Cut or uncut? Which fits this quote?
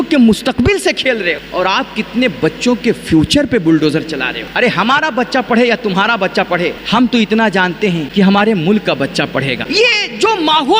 cut